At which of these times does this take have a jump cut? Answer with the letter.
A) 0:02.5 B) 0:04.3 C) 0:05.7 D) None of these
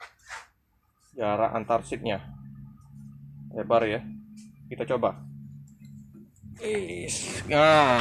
D